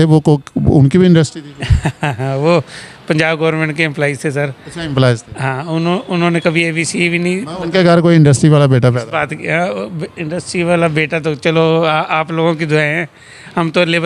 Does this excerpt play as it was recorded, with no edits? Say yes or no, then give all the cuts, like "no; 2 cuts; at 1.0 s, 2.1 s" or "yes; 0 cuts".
yes; 0 cuts